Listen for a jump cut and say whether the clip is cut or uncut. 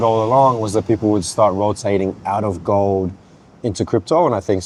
uncut